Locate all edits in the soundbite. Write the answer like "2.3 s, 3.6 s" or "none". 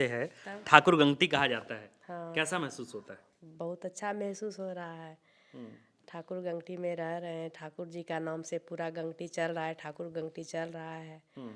none